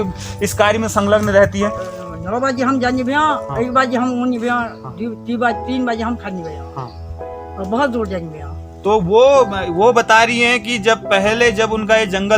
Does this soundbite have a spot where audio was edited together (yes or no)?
yes